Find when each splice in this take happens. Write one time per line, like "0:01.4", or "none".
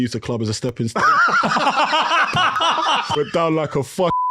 0:03.1